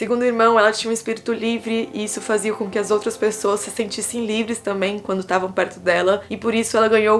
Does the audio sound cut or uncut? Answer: uncut